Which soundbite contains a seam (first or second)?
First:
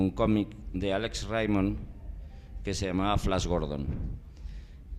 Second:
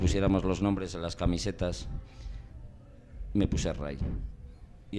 first